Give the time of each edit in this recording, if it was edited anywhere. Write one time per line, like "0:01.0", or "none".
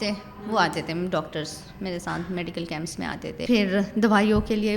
0:03.4